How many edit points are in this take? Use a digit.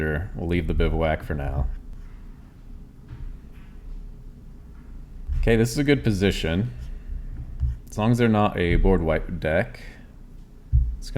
2